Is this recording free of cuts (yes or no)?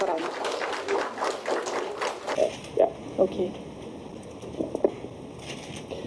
no